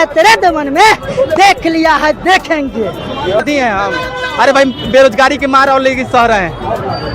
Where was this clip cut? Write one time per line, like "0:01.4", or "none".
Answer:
0:03.4